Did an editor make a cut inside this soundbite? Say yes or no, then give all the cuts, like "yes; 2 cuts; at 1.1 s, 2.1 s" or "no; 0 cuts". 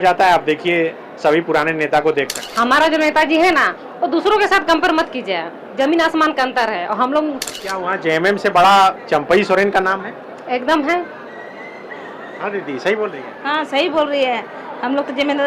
yes; 2 cuts; at 2.4 s, 7.5 s